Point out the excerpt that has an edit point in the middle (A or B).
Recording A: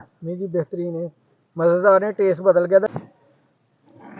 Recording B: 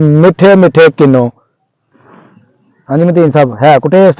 A